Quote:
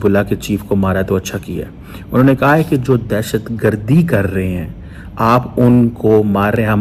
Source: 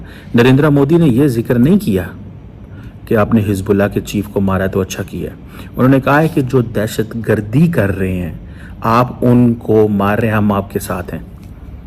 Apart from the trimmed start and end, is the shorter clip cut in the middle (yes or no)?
no